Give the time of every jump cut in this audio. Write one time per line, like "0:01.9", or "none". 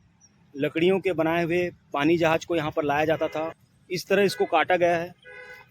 0:03.6

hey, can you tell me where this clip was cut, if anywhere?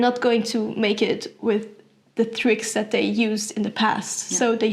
none

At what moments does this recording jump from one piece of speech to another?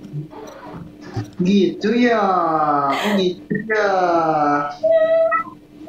0:01.3

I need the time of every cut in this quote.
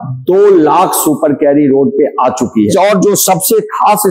0:02.7

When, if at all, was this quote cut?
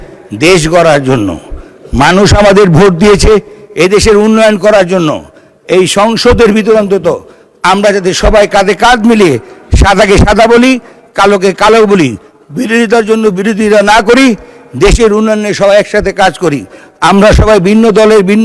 none

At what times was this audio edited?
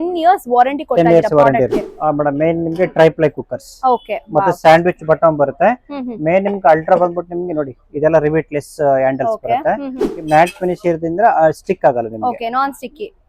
0:01.8
0:10.1

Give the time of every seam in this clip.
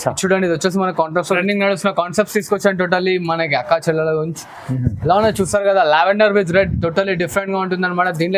0:01.4

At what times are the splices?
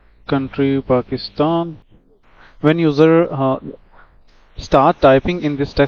0:01.8

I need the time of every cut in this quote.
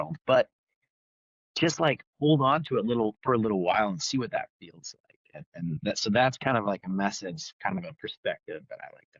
none

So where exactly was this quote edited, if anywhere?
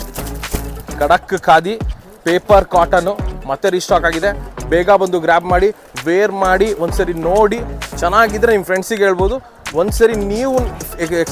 none

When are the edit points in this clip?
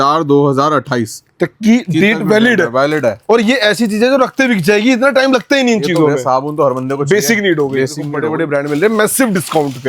0:08.2

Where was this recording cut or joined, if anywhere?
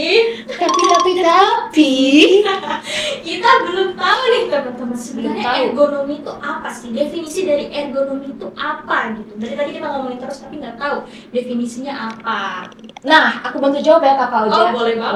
none

